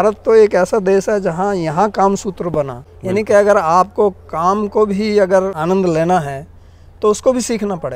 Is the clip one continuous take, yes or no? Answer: no